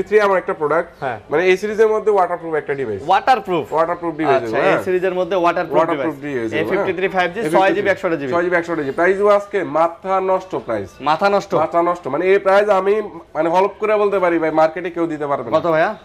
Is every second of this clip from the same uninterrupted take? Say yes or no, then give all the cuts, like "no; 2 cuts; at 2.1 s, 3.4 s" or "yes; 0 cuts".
yes; 0 cuts